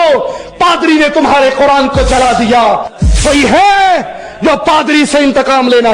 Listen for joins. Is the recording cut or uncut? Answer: cut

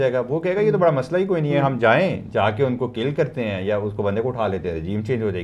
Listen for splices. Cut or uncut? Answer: uncut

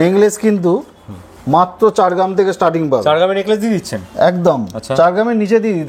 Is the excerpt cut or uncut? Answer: uncut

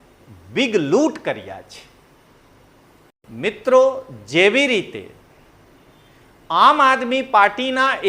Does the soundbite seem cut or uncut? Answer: cut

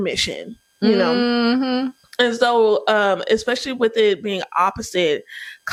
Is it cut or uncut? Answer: uncut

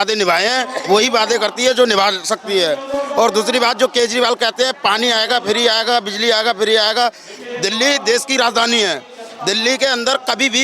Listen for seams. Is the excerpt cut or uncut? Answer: uncut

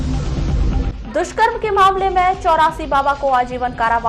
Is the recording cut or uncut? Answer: cut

